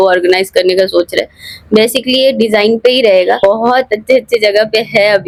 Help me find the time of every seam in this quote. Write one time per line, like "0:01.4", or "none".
none